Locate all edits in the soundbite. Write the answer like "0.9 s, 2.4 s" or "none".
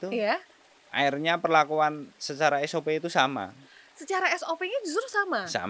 none